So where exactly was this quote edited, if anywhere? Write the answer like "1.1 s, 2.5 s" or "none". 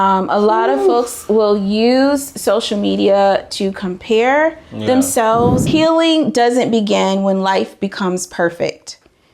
5.6 s